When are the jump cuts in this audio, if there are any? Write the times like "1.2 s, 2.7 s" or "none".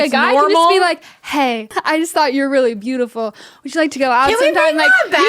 1.7 s